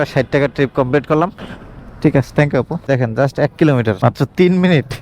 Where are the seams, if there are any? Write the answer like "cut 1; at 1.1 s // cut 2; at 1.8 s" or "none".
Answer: cut 1; at 1.3 s